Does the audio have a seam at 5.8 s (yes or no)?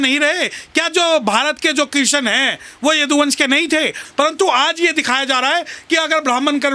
no